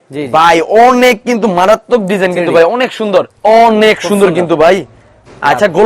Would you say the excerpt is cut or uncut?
cut